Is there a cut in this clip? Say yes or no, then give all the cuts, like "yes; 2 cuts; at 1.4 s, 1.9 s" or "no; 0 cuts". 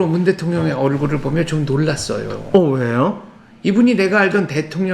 no; 0 cuts